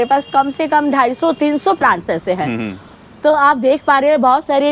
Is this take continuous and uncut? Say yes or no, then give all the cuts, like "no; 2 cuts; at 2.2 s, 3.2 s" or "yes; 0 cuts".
yes; 0 cuts